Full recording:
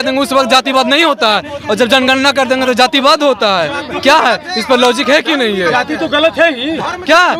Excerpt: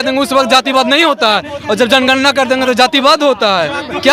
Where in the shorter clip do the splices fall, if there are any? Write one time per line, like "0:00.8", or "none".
none